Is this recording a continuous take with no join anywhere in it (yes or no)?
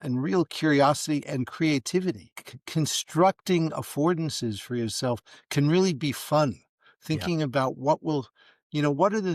yes